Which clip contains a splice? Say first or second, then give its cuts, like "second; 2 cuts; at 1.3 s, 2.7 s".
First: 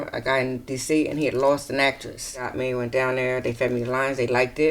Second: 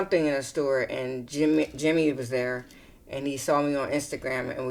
first; 1 cut; at 2.5 s